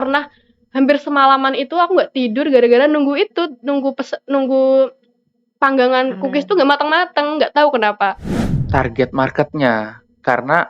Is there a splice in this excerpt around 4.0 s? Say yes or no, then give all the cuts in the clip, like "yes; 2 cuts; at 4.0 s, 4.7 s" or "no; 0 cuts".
no; 1 cut; at 8.6 s